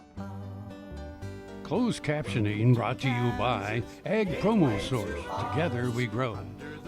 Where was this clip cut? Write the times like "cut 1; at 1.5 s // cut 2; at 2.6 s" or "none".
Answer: cut 1; at 1.7 s